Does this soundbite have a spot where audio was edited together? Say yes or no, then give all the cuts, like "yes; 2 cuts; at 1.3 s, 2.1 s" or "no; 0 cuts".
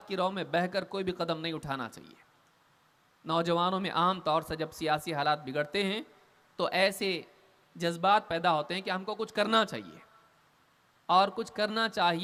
no; 0 cuts